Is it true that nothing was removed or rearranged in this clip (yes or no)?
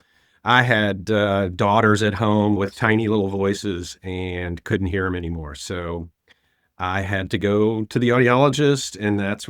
no